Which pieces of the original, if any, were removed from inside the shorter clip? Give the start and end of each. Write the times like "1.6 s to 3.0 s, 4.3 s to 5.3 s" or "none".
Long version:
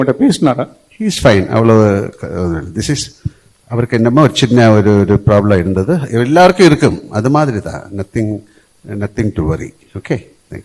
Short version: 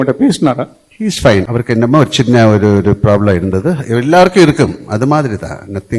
1.5 s to 3.7 s